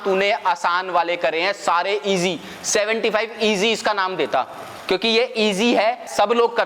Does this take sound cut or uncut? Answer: uncut